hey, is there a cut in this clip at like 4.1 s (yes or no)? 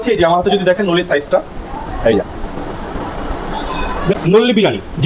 yes